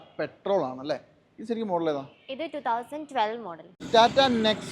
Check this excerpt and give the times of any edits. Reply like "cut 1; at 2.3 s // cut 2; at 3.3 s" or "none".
cut 1; at 3.7 s